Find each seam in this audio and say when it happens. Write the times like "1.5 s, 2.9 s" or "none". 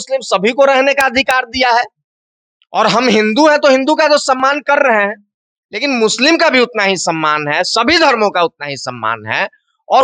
none

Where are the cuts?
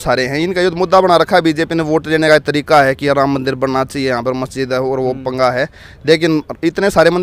none

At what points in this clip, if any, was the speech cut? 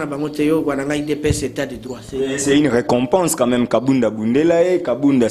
none

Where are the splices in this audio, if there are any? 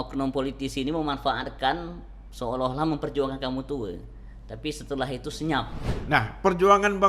5.9 s

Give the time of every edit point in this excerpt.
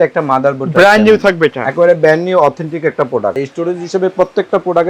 3.4 s

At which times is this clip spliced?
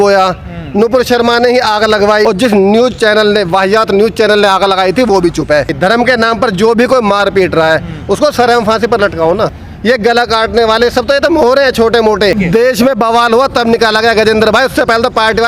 2.2 s, 5.7 s, 9.7 s, 12.4 s

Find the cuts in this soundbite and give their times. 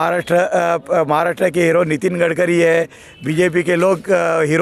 none

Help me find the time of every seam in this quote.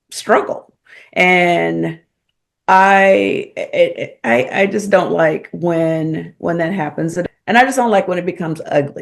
7.2 s

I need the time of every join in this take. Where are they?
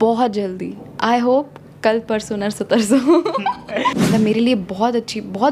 3.9 s

